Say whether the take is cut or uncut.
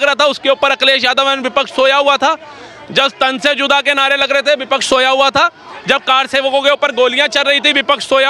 uncut